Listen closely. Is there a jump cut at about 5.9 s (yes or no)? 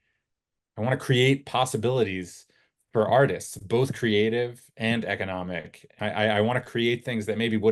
yes